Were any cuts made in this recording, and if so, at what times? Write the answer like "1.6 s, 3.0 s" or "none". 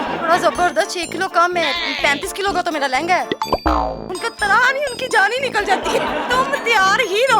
4.1 s, 6.3 s